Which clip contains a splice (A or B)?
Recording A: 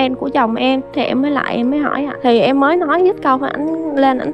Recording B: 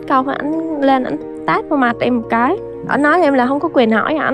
A